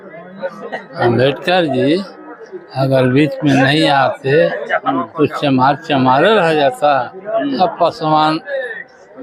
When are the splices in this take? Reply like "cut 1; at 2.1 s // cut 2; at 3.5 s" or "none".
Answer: none